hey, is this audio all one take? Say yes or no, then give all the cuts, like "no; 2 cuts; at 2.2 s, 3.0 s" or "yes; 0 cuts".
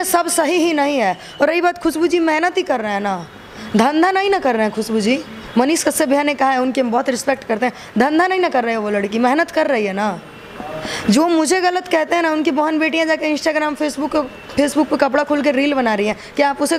yes; 0 cuts